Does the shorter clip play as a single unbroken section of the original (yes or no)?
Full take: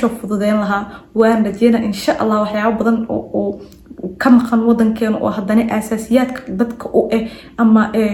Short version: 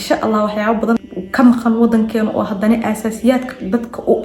no